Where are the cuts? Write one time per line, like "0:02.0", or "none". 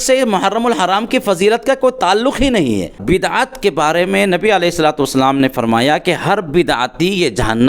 0:03.0